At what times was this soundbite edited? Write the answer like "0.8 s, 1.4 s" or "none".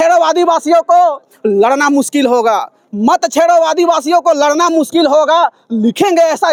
none